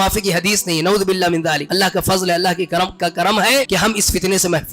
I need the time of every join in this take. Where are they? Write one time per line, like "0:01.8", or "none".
0:01.6
0:03.7